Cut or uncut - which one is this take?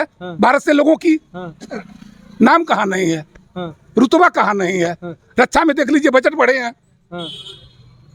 uncut